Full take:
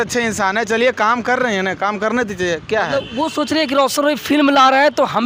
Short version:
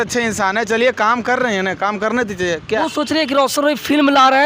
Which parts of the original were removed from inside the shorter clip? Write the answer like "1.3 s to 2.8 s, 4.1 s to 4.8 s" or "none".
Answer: 2.8 s to 3.2 s

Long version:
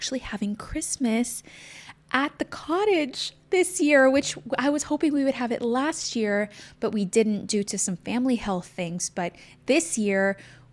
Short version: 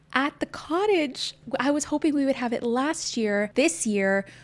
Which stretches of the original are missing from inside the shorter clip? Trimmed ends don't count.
3.4 s to 4.4 s, 6.5 s to 9.6 s

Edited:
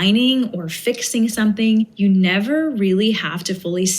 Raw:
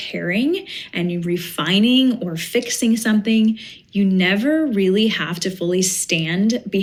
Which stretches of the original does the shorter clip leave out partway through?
3.6 s to 3.9 s

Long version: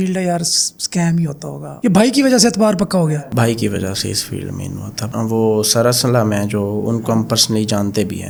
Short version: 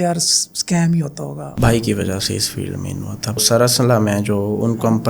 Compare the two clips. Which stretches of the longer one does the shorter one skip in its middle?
1.7 s to 3.2 s, 5.1 s to 5.6 s

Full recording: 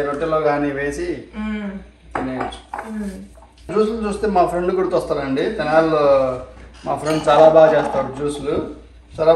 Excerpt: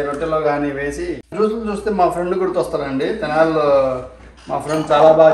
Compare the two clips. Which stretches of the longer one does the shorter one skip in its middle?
1.2 s to 3.6 s

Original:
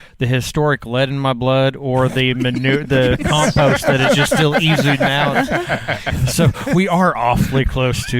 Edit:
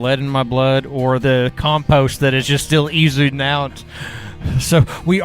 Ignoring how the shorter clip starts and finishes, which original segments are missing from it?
2.1 s to 2.9 s

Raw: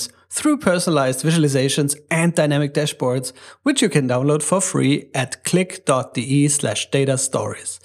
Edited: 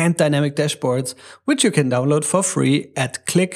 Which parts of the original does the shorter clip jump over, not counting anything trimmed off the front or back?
none

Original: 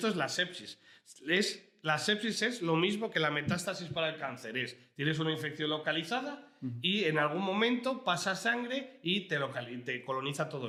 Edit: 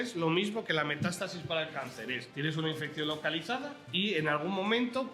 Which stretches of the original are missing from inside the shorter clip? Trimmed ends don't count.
4.7 s to 4.9 s, 6.5 s to 6.7 s

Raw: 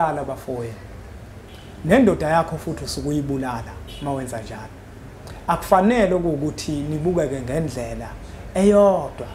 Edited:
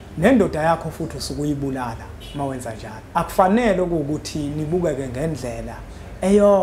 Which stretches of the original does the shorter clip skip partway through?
4.6 s to 5.3 s

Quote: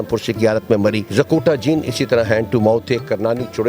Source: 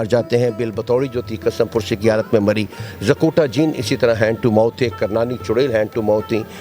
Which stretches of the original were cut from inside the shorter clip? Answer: 2.7 s to 2.9 s

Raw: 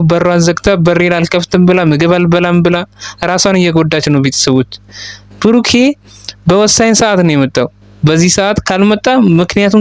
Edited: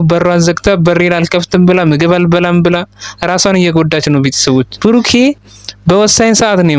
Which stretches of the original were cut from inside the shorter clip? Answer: 4.7 s to 5.3 s

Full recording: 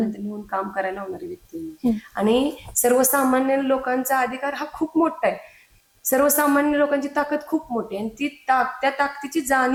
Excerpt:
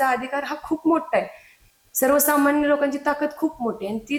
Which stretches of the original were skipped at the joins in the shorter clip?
none

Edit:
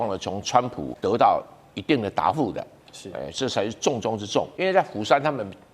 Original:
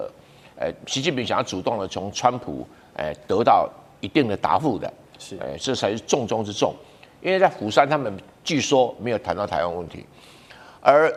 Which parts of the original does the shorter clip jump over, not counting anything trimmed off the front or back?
2.6 s to 3.2 s, 6.8 s to 7.2 s

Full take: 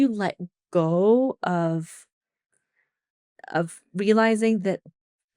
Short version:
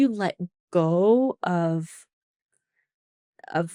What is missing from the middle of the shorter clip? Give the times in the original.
none

